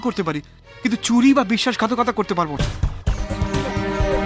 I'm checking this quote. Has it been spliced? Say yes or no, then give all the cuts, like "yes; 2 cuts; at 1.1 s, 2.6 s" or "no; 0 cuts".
yes; 1 cut; at 2.5 s